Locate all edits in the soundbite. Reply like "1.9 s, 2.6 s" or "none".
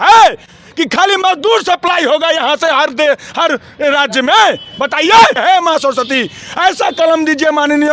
5.4 s